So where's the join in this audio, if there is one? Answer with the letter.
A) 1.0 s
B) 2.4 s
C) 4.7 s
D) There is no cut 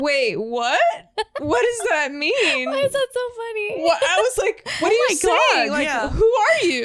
C